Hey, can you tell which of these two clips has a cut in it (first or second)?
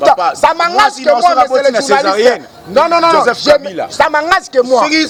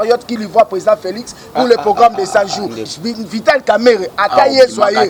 second